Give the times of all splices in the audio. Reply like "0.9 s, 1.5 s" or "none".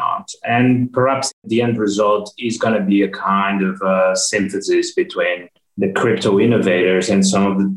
1.3 s